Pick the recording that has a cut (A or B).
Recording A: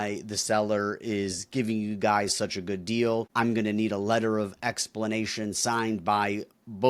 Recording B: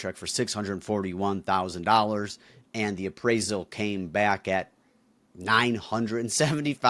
A